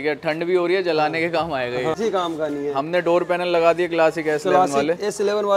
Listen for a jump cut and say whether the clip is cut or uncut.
cut